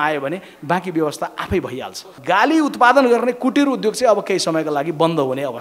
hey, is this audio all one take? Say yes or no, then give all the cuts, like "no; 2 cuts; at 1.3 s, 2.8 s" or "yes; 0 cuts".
no; 1 cut; at 2.1 s